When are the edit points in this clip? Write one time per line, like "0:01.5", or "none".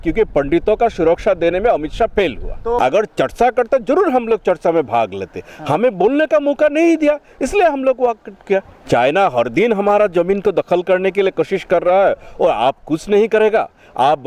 0:02.8
0:08.7

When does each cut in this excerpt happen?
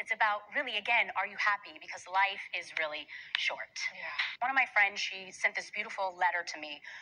0:04.3
0:04.8

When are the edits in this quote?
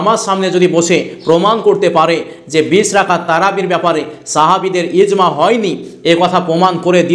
none

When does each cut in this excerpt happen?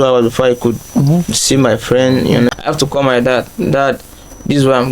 0:02.6

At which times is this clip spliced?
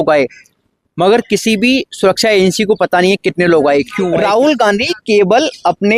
0:04.0

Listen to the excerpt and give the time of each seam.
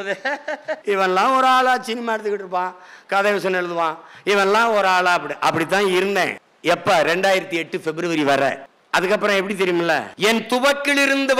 0:00.8
0:06.5
0:10.1

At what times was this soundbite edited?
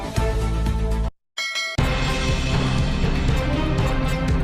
0:01.0

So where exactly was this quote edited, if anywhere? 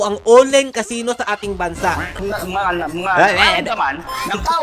0:02.2

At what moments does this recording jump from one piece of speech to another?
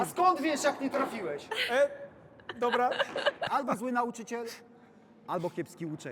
0:03.4

